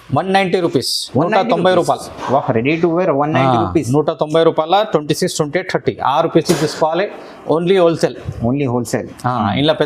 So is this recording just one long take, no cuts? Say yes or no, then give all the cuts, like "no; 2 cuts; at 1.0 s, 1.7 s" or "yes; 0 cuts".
yes; 0 cuts